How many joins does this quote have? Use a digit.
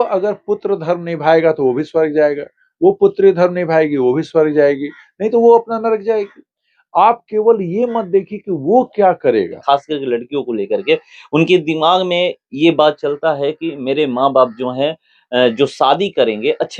1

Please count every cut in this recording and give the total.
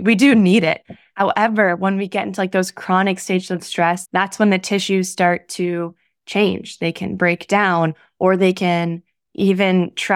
1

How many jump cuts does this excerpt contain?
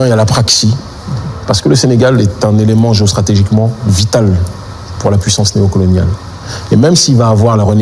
0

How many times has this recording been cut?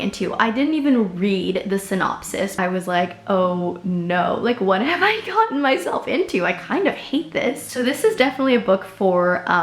2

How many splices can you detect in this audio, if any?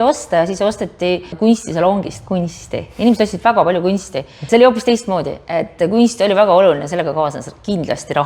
2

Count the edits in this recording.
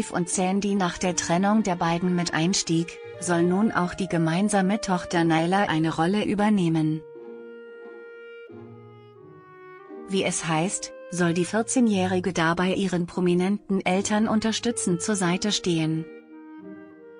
1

